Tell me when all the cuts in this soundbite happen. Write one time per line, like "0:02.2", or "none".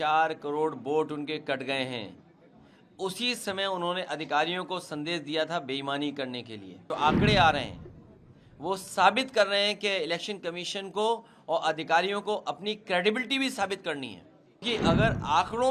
0:06.9
0:14.6